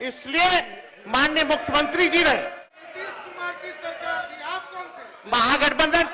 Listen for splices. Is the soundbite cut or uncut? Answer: cut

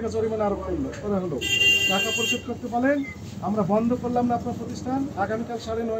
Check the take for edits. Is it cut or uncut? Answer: uncut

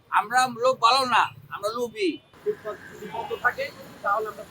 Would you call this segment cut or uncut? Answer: cut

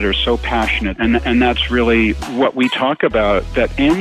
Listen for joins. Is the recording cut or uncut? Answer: cut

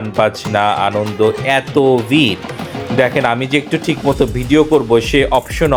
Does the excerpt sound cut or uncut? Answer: uncut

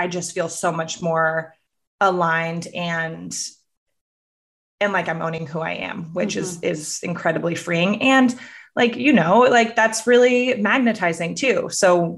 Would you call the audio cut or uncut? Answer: uncut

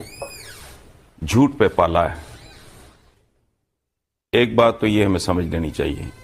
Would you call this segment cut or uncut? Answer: uncut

